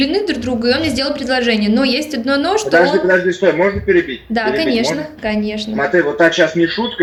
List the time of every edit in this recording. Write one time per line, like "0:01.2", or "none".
none